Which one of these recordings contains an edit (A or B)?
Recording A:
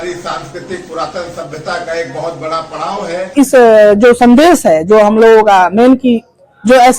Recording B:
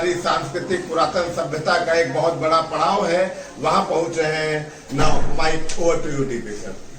A